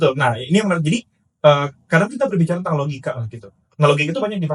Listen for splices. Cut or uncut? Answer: uncut